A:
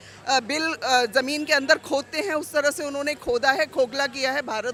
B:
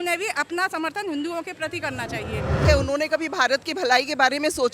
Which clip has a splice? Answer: B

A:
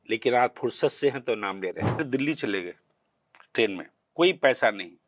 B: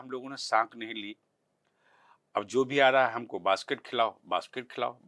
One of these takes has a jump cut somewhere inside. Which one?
A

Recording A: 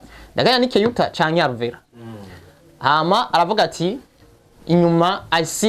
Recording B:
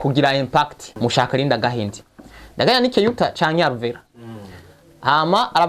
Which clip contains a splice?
B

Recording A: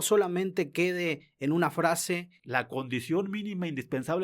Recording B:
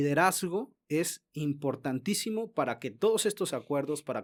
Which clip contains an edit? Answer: A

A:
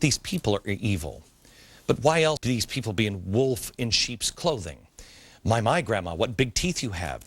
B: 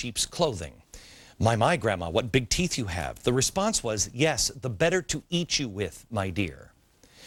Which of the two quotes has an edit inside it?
A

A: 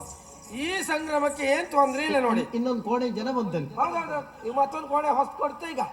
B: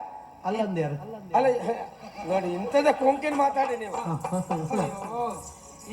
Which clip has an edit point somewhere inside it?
B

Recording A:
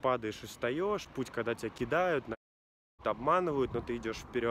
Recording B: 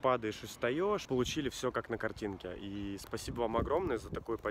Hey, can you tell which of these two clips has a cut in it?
B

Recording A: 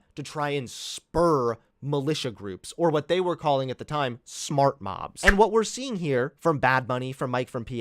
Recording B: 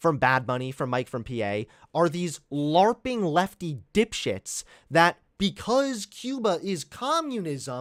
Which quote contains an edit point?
A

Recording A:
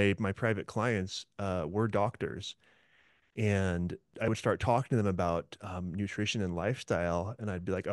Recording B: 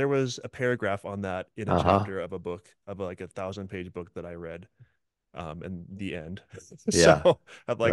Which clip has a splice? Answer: A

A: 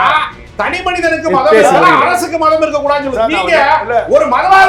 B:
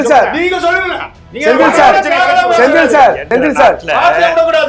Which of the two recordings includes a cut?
B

